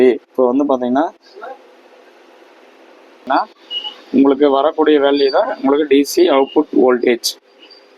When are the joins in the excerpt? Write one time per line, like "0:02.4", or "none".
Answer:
0:03.3